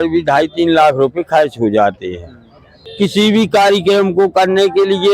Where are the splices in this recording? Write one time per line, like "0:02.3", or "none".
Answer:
0:02.9